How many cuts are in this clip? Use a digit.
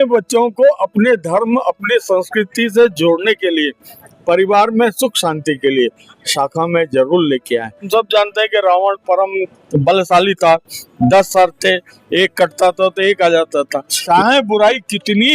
2